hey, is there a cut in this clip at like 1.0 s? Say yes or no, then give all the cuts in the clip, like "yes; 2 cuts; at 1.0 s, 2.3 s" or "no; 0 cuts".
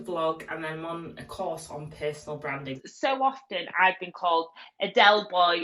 no; 1 cut; at 2.8 s